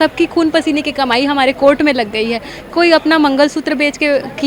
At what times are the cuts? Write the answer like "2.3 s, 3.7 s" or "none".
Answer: none